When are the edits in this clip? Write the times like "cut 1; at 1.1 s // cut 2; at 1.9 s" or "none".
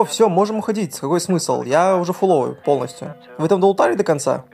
none